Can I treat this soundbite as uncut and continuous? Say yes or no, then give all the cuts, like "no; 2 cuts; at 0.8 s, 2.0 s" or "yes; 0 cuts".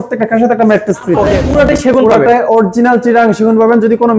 no; 1 cut; at 1.4 s